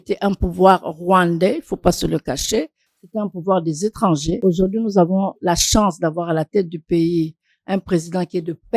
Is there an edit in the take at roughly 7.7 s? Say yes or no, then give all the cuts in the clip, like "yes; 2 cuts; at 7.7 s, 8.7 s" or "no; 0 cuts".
no; 1 cut; at 4.4 s